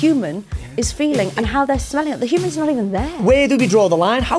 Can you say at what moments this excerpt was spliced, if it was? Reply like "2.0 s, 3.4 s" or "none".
3.2 s